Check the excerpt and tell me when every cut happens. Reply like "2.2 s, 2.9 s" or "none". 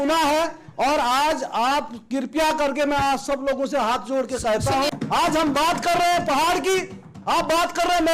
4.9 s